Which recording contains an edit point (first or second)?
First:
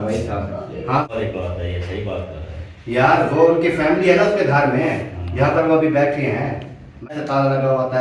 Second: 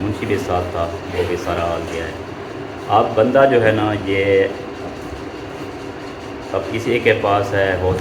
first